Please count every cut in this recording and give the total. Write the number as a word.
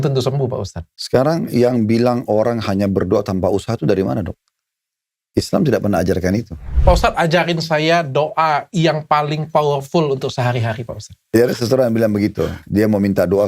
three